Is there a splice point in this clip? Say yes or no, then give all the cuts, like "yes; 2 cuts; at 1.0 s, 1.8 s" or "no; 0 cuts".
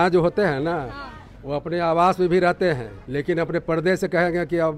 yes; 1 cut; at 2.9 s